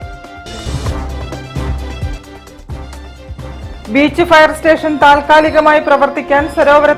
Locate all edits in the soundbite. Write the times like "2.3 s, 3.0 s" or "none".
3.0 s